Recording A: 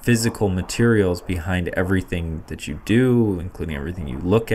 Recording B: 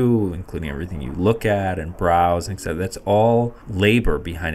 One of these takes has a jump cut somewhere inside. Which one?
B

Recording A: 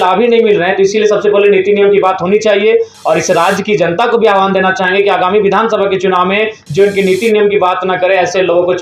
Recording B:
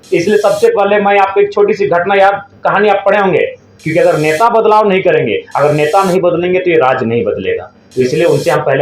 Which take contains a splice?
B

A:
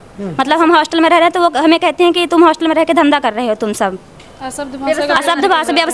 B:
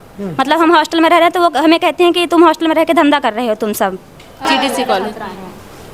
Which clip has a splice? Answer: B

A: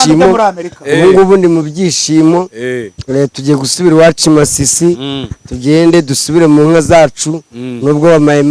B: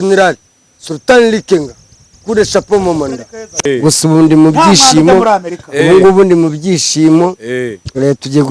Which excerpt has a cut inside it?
B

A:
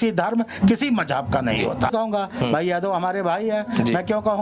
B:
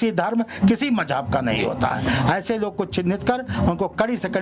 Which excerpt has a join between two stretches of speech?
A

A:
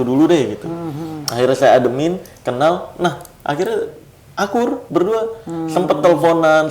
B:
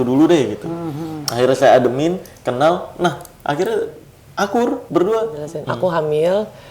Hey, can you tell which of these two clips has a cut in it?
B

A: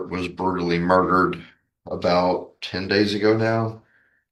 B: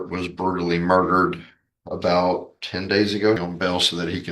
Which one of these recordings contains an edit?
B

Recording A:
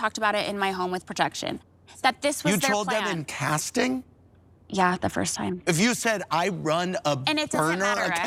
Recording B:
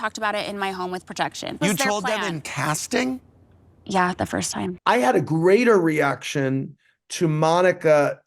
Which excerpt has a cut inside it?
B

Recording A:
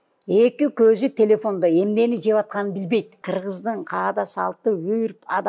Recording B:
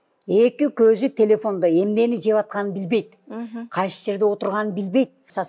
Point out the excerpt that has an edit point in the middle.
A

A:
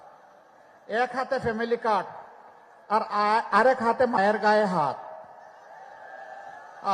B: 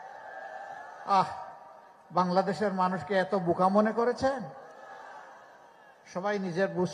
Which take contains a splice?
A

